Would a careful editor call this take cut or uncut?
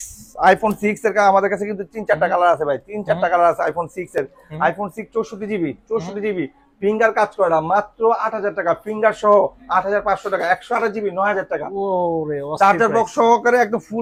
uncut